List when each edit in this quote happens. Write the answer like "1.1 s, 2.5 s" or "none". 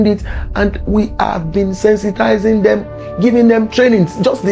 none